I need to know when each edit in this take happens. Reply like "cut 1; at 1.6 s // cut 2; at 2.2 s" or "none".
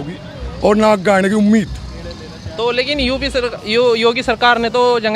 none